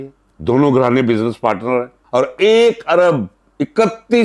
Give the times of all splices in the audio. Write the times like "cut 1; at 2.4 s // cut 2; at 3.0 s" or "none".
cut 1; at 2.0 s